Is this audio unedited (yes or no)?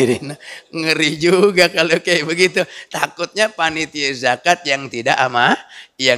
yes